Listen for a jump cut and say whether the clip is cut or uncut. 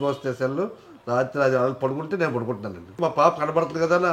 cut